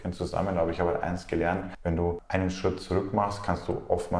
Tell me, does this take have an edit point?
yes; 1 cut; at 2.1 s

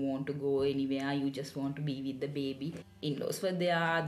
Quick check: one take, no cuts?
no; 1 cut; at 2.8 s

